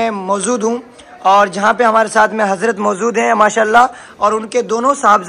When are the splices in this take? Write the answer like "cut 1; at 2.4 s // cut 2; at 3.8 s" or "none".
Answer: none